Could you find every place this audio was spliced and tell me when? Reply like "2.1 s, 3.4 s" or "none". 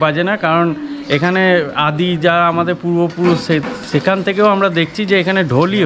none